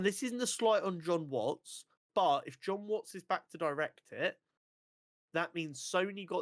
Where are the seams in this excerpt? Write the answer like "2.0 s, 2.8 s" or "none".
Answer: none